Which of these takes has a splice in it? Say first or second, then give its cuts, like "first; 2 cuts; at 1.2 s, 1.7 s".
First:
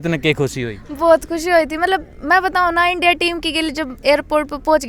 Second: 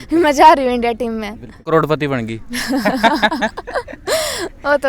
second; 1 cut; at 1.7 s